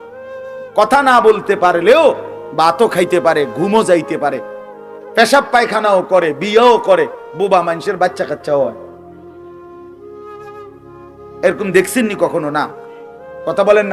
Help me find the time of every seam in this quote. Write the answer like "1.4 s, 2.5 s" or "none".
9.0 s, 11.0 s